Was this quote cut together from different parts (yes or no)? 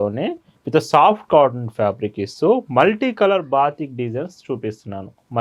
no